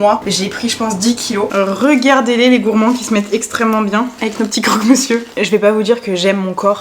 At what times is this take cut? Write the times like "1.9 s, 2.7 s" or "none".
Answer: 1.5 s, 4.1 s, 5.3 s